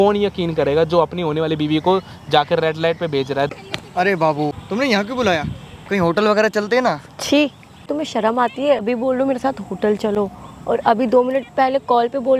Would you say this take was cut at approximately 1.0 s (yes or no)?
no